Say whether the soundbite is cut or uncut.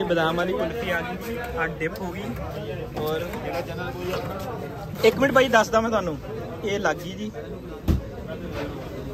uncut